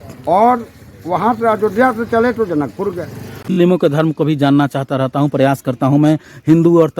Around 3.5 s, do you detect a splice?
yes; 1 cut; at 3.5 s

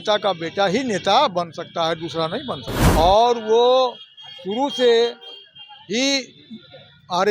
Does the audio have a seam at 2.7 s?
yes; 1 cut; at 2.7 s

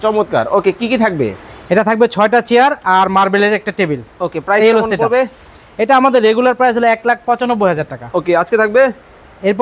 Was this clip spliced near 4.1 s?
no; 0 cuts

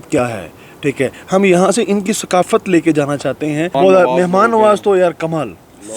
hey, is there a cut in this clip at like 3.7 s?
yes; 1 cut; at 3.7 s

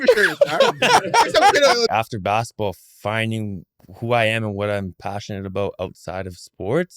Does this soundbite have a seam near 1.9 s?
yes; 1 cut; at 1.9 s

